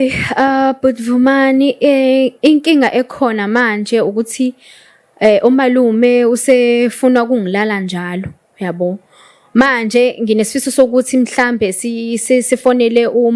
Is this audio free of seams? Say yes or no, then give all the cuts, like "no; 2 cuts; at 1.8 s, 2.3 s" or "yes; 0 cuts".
yes; 0 cuts